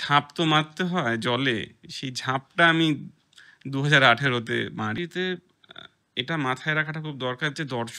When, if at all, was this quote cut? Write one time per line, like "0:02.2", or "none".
0:05.0

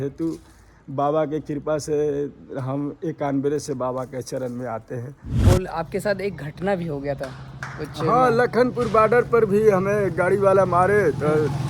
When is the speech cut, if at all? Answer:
0:05.4

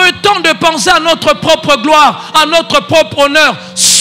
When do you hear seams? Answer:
none

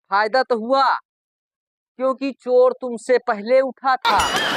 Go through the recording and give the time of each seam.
none

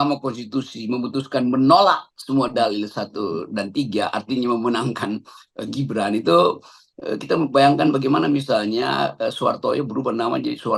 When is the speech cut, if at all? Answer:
none

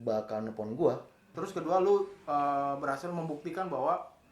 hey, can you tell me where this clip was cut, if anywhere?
0:01.4

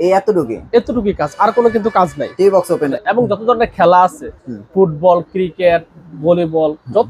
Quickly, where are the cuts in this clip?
0:03.0

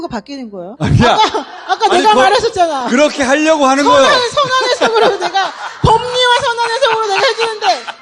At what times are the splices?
none

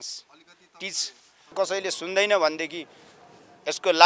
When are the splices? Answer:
0:01.5

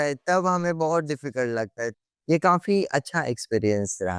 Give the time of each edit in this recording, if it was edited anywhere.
0:01.9

